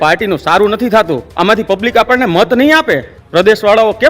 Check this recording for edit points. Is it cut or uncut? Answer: cut